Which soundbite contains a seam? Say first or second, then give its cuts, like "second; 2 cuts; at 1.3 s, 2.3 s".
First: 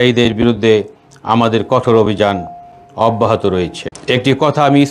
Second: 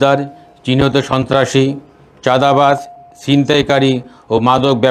first; 1 cut; at 3.8 s